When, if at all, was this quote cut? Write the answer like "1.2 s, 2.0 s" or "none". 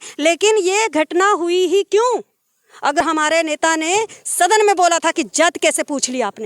3.0 s